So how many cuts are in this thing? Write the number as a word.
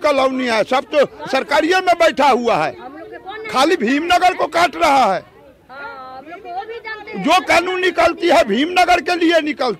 zero